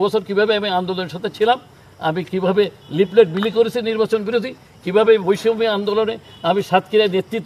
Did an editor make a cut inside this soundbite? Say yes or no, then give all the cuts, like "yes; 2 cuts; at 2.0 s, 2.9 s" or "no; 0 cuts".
no; 0 cuts